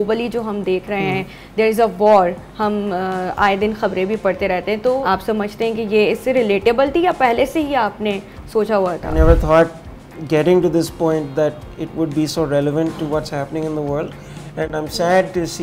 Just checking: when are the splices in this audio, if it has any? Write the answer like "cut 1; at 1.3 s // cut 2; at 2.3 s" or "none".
cut 1; at 9.1 s